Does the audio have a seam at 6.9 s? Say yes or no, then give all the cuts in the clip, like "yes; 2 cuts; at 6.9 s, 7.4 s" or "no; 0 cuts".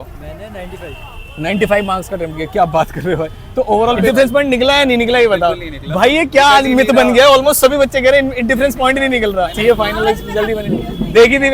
no; 2 cuts; at 4.0 s, 9.5 s